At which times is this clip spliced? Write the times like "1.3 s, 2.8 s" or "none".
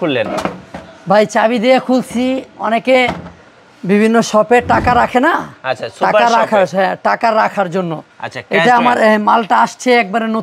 none

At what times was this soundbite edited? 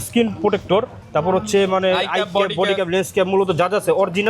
1.0 s

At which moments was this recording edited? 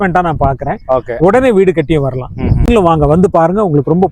2.7 s

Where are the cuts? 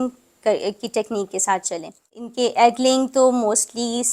2.2 s

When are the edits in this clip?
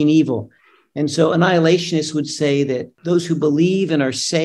2.9 s

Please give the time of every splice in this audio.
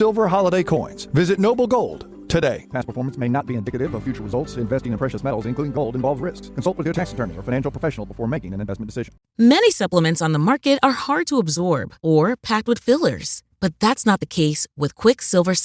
9.2 s

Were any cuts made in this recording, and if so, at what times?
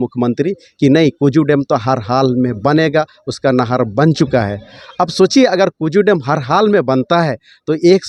none

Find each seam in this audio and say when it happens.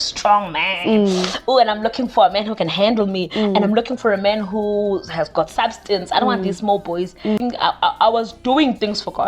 7.4 s

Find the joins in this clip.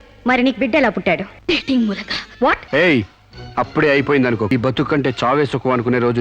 1.3 s, 2.6 s, 4.5 s

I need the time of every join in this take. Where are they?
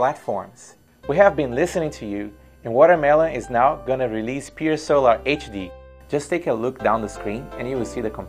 3.8 s

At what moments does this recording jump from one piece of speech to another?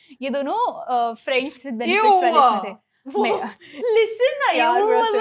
1.6 s

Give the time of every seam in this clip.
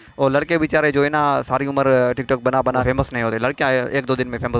2.8 s

